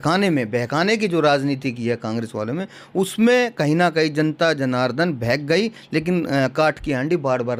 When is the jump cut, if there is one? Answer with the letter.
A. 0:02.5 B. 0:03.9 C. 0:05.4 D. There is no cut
D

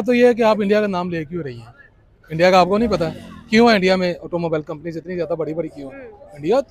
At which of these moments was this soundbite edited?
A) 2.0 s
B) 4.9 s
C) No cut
C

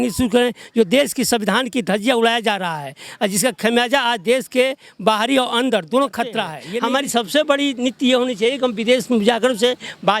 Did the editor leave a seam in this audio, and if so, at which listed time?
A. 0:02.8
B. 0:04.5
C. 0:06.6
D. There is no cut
C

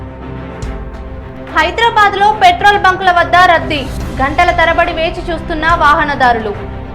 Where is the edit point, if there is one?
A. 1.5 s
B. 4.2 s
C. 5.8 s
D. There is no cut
A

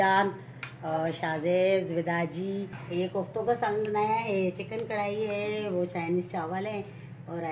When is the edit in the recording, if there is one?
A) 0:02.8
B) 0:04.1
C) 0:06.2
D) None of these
A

